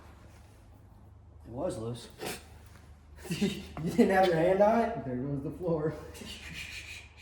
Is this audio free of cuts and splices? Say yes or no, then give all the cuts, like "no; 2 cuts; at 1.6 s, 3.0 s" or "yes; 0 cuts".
yes; 0 cuts